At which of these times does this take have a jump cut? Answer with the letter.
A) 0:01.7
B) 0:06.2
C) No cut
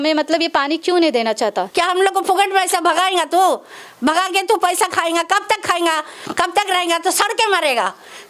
A